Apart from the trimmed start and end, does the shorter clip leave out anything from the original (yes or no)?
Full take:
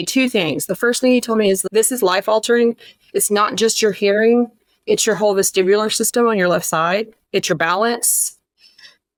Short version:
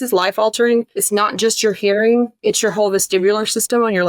yes